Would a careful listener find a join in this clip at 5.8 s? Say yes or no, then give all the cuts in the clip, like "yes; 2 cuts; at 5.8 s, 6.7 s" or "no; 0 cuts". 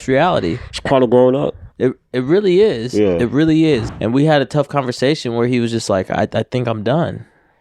no; 1 cut; at 3.9 s